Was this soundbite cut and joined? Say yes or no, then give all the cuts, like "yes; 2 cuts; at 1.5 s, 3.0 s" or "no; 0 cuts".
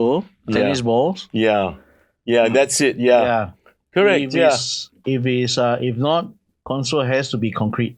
no; 0 cuts